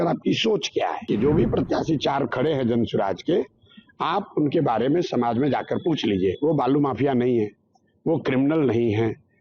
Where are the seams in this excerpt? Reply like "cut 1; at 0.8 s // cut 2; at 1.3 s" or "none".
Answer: cut 1; at 1.0 s